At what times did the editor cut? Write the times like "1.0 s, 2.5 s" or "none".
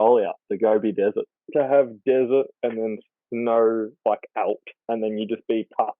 1.4 s, 4.7 s